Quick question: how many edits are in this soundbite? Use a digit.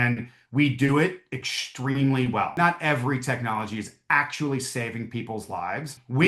1